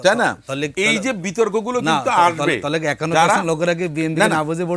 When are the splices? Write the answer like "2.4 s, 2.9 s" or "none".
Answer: none